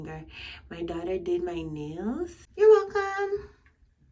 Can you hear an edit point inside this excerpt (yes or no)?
yes